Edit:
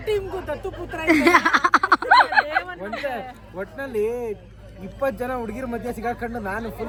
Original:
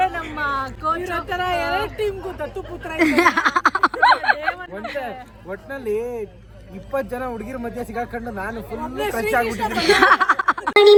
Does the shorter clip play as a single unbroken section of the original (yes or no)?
yes